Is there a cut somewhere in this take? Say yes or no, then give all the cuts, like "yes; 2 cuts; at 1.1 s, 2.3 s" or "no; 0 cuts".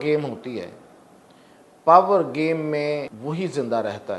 yes; 1 cut; at 3.1 s